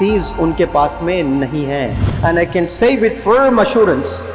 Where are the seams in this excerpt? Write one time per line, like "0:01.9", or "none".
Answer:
0:02.1